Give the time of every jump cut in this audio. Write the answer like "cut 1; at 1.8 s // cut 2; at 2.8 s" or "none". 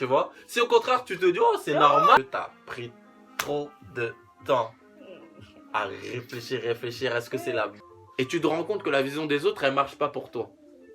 cut 1; at 2.2 s // cut 2; at 7.7 s